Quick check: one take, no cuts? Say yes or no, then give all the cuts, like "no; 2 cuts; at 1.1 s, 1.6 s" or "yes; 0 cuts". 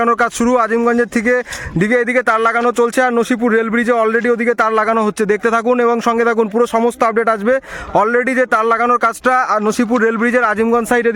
yes; 0 cuts